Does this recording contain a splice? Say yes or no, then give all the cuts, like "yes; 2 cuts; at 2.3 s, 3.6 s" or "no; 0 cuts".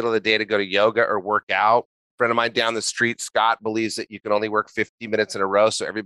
yes; 1 cut; at 2.0 s